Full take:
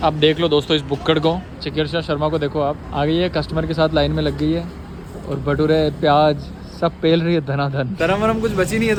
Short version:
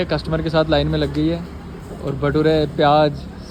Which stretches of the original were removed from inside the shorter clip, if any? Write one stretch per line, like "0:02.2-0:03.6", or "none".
none